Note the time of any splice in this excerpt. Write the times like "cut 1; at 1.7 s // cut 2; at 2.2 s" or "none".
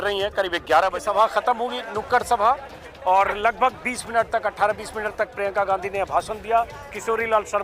cut 1; at 1.0 s